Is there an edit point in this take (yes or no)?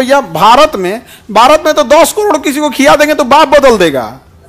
no